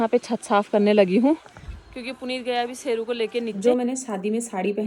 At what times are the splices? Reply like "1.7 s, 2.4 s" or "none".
3.6 s